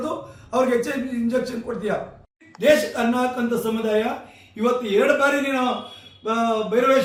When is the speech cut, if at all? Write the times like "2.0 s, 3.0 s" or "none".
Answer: none